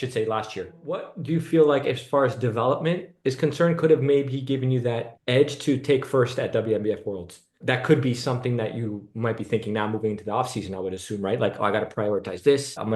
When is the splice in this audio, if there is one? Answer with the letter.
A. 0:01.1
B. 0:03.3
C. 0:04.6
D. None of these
A